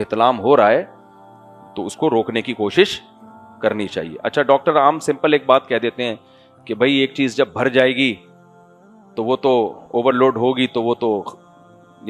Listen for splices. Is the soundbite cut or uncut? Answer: uncut